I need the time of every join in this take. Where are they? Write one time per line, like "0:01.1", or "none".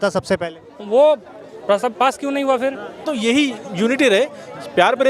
0:03.1